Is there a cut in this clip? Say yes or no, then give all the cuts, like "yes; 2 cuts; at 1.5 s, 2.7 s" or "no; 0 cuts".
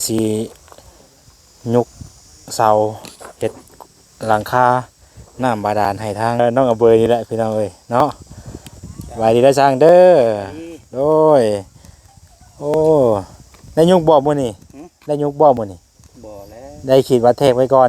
yes; 1 cut; at 6.4 s